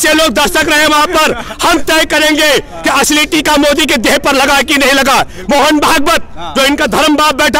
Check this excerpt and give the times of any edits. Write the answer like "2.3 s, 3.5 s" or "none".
none